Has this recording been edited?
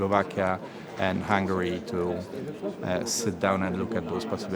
no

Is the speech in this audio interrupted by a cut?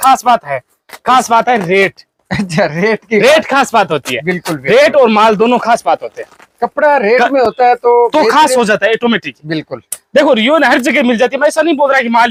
no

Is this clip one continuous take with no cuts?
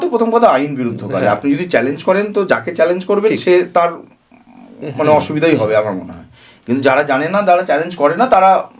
yes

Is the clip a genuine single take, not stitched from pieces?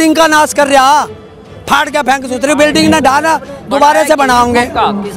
yes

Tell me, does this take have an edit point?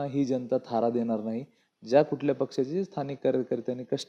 no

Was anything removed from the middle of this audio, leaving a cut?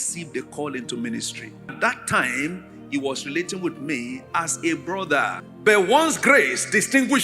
yes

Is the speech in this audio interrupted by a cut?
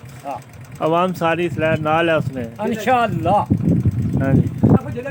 no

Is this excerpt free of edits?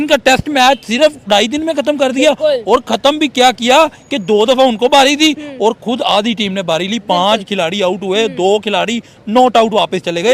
yes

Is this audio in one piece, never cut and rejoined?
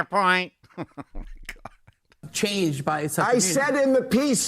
no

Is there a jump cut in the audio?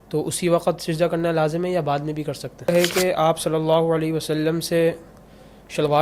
yes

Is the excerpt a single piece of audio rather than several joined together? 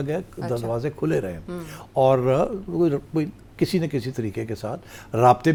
yes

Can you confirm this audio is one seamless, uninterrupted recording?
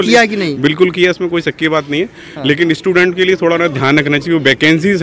yes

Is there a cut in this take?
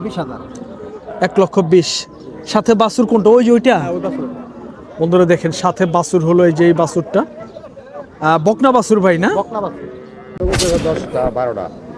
yes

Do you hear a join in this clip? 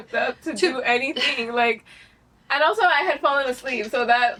no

